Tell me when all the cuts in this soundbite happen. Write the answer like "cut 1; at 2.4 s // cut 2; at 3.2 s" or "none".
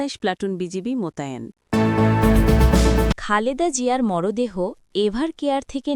cut 1; at 1.6 s // cut 2; at 3.2 s